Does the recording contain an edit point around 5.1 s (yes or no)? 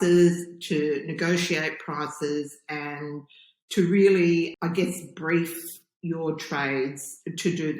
no